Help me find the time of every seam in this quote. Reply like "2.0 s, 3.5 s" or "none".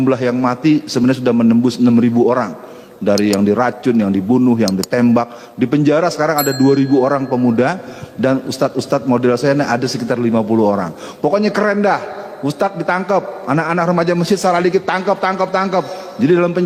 none